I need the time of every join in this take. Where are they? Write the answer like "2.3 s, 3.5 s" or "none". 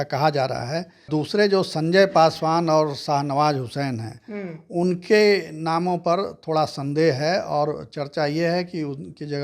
1.1 s

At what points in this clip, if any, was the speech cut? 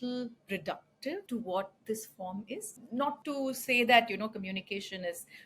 1.2 s, 3.1 s

